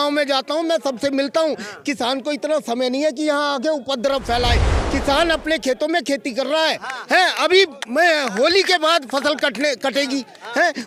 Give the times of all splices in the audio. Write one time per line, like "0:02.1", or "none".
none